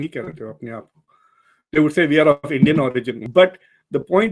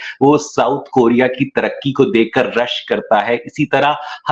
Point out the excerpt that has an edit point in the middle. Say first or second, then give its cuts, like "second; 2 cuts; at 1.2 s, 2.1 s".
first; 1 cut; at 3.2 s